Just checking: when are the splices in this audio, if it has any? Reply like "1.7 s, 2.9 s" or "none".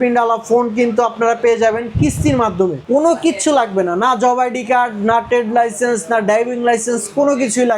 2.8 s